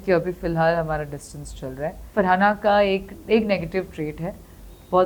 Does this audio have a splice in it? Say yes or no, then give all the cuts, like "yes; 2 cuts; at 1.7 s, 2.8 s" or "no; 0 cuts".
yes; 1 cut; at 2.1 s